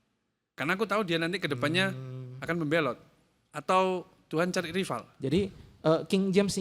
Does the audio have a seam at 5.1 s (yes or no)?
yes